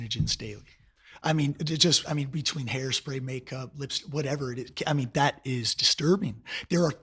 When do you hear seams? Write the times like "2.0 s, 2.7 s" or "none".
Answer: none